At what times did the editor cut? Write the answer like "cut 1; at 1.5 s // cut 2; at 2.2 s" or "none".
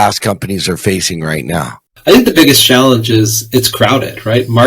cut 1; at 1.9 s